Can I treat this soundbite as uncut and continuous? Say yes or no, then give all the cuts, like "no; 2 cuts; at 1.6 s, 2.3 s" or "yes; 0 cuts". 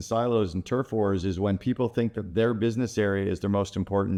yes; 0 cuts